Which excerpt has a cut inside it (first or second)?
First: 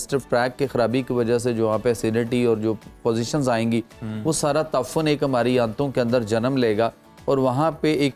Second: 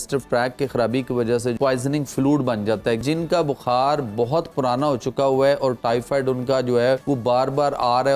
second